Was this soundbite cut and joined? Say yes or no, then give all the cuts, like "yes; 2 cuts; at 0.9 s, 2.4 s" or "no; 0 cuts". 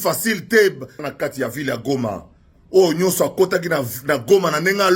yes; 1 cut; at 1.0 s